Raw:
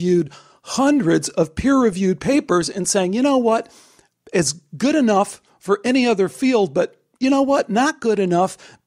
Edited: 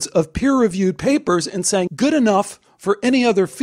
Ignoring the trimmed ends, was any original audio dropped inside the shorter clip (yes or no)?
yes